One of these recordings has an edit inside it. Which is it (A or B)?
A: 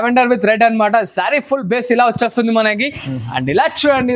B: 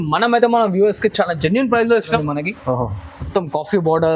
B